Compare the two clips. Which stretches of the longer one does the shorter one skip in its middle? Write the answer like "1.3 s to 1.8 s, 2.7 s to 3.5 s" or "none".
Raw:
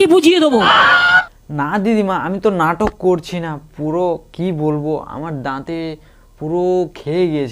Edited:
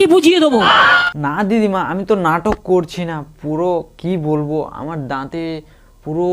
1.1 s to 1.4 s

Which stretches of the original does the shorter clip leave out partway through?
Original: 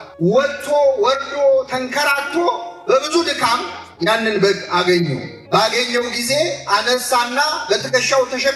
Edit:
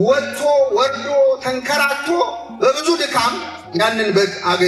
none

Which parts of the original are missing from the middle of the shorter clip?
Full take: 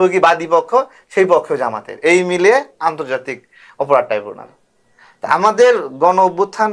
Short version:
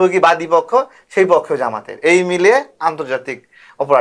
none

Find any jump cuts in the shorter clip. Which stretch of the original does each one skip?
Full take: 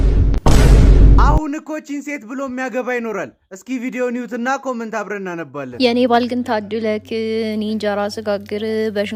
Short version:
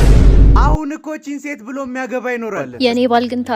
3.3 s to 5.6 s

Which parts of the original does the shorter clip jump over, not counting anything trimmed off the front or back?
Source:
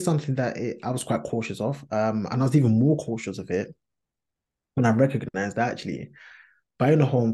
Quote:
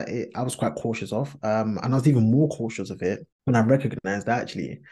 3.8 s to 4.6 s

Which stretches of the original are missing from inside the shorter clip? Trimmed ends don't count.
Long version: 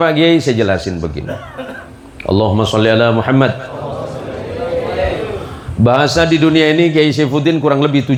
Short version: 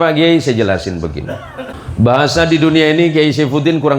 1.8 s to 5.6 s

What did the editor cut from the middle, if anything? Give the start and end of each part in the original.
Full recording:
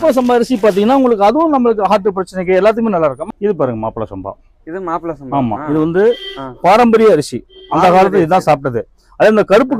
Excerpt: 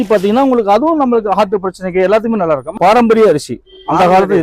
3.2 s to 6.5 s

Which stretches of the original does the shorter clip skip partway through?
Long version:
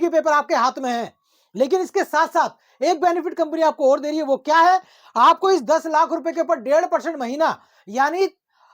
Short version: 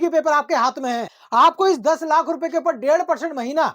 1.1 s to 5.0 s

